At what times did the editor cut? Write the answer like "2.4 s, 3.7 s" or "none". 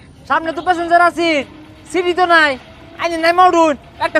none